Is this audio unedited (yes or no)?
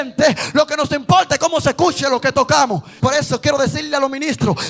no